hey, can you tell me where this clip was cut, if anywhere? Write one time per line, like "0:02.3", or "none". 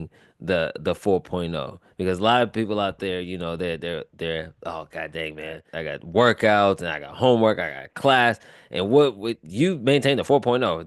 0:05.6